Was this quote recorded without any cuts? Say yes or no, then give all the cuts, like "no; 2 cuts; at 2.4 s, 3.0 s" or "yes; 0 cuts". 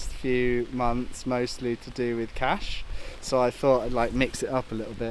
yes; 0 cuts